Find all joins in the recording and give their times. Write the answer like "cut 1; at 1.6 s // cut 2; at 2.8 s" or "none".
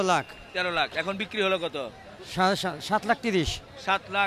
none